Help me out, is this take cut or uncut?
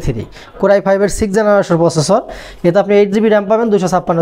uncut